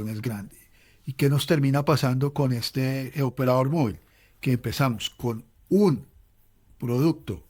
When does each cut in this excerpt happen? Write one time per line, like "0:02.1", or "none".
none